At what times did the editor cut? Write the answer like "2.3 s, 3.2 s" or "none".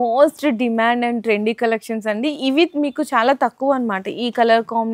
none

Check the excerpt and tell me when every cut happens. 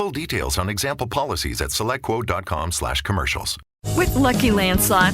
3.6 s

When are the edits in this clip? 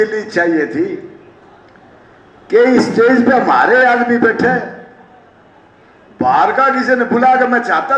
none

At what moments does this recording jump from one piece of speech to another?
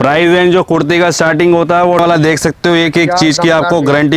2.0 s

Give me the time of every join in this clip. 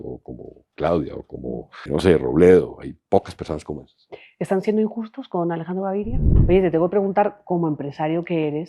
1.8 s, 6.3 s

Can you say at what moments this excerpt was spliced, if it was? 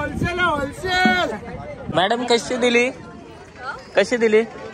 1.9 s

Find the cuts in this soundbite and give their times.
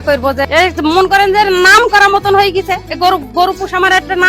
2.9 s

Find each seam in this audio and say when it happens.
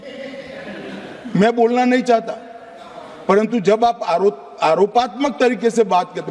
none

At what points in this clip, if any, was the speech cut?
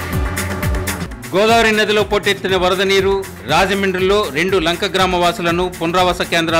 1.0 s

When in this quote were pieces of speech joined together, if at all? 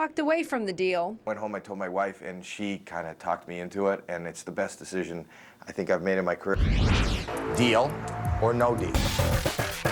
6.5 s, 9.0 s

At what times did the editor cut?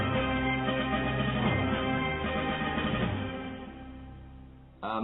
none

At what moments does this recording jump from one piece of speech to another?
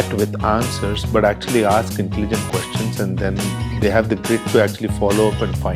none

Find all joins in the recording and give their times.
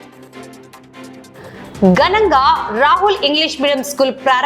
1.3 s

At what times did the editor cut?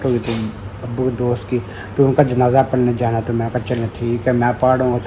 none

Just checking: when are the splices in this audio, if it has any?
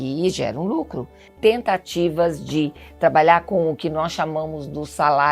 1.3 s

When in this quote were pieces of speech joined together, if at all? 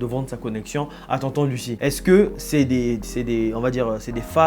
1.7 s

